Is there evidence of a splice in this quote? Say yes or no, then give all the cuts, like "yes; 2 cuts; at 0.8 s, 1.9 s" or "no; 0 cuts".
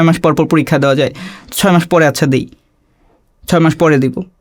no; 0 cuts